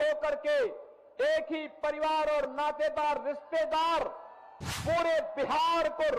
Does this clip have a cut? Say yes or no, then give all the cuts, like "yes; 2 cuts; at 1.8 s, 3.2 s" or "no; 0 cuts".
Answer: no; 0 cuts